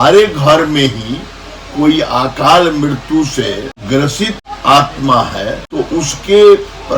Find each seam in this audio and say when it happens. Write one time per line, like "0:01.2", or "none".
0:03.8
0:04.5
0:05.6